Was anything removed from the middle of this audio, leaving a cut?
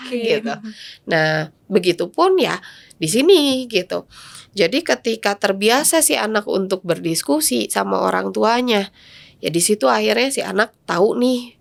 no; 0 cuts

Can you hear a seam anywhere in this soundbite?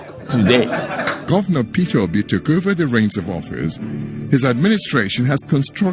yes; 1 cut; at 1.2 s

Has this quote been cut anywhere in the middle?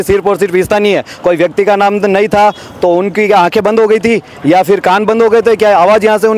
no; 0 cuts

